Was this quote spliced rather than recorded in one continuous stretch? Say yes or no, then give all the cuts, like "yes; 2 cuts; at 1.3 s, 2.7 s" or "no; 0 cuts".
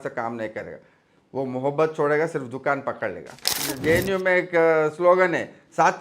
yes; 1 cut; at 3.7 s